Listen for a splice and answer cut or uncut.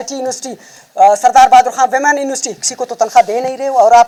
uncut